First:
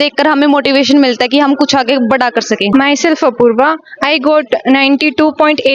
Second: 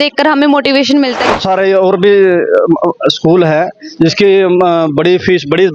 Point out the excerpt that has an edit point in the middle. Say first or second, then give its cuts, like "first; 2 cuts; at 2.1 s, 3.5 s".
second; 1 cut; at 1.3 s